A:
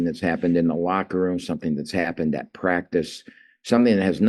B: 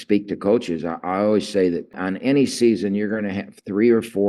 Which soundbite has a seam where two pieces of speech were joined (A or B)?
B